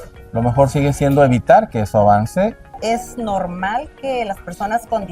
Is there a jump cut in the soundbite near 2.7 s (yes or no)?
yes